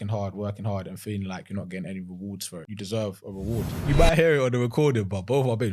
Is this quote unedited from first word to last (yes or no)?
no